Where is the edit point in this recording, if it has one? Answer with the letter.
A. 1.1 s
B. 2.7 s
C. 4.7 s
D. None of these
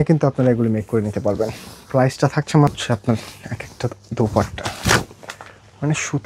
B